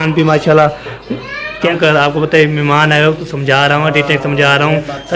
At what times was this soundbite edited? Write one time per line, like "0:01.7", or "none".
0:01.7